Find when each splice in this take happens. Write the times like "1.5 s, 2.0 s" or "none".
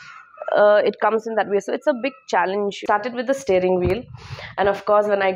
2.8 s

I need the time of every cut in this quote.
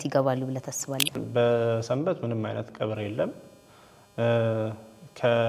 1.2 s

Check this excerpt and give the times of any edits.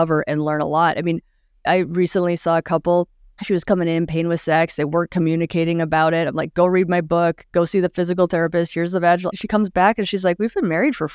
none

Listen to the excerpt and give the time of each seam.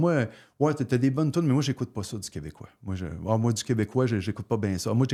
none

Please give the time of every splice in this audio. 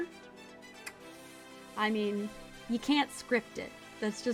none

